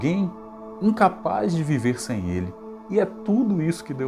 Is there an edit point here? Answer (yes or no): no